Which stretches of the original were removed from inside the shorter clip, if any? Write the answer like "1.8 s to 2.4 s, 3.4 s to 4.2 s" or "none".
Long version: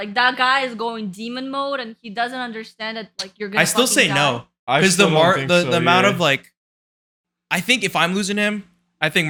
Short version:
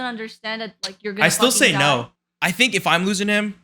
4.5 s to 7.2 s

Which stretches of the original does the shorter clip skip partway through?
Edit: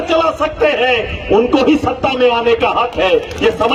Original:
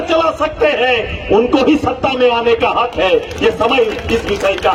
none

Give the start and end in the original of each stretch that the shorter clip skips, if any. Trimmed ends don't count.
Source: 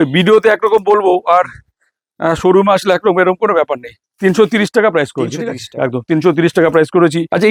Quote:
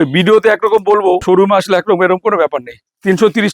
1.2 s to 2.4 s

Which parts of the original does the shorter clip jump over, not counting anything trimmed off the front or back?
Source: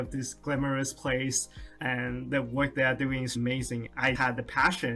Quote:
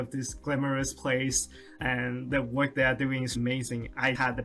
none

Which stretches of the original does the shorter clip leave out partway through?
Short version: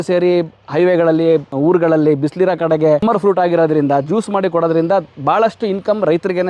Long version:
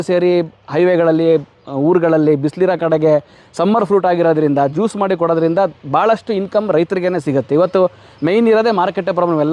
1.5 s to 1.7 s, 3.2 s to 3.7 s

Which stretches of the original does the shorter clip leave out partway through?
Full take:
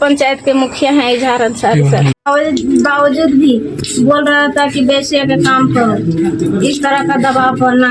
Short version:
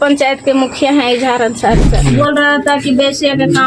2.0 s to 3.9 s

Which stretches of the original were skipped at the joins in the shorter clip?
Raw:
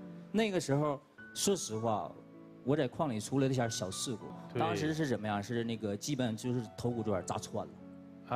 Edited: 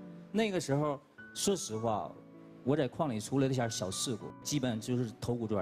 4.4 s to 6.0 s

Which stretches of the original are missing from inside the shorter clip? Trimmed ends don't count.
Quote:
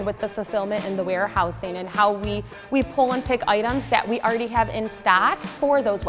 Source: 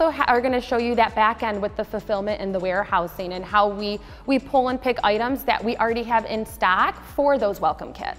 none

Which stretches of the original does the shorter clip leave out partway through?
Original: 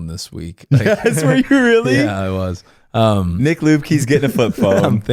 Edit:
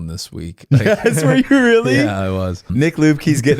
2.7 s to 3.3 s

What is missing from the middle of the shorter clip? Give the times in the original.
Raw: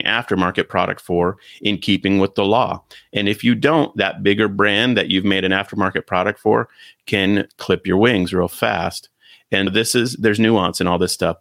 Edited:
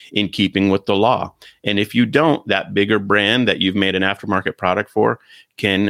none

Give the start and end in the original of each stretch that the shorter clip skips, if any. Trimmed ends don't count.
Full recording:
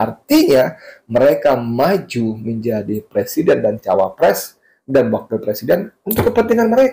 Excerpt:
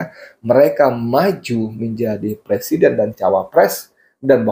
none

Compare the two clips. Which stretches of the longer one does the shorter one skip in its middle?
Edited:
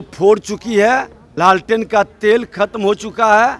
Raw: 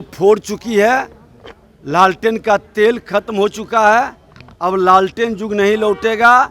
1.2 s to 1.7 s

